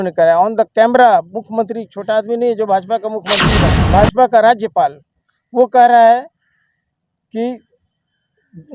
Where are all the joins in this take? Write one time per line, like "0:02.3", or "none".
0:03.6